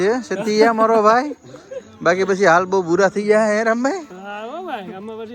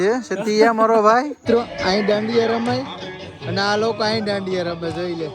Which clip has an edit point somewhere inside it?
second; 1 cut; at 1.4 s

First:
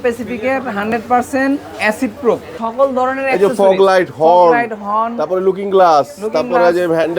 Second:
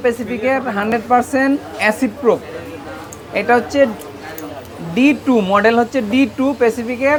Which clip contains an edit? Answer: first; 1 cut; at 2.6 s

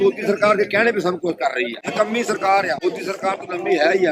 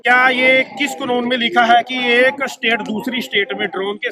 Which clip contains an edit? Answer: first; 2 cuts; at 1.8 s, 2.8 s

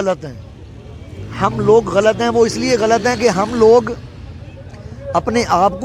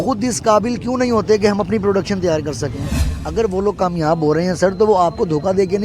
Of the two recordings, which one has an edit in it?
second; 1 cut; at 3.1 s

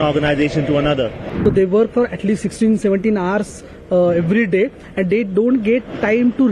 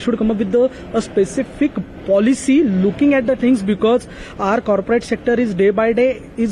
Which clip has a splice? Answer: first; 1 cut; at 1.2 s

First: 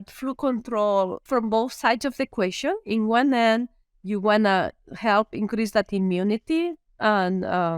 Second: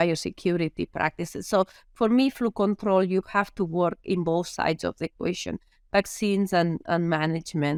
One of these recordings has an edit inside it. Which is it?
first; 1 cut; at 1.2 s

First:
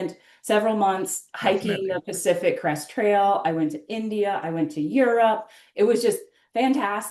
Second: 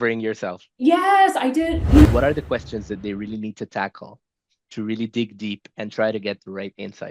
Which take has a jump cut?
second; 1 cut; at 2.1 s

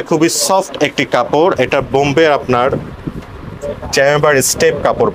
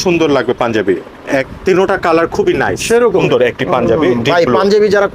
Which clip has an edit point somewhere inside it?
second; 2 cuts; at 1.5 s, 3.2 s

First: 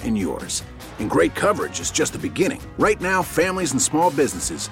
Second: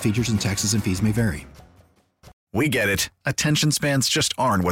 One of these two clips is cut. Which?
second; 1 cut; at 2.3 s

